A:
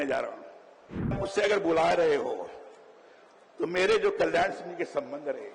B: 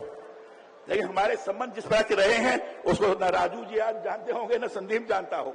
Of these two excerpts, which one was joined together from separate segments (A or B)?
A